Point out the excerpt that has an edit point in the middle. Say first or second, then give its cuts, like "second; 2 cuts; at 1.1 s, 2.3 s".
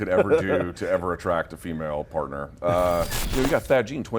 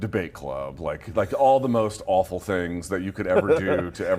first; 1 cut; at 3.2 s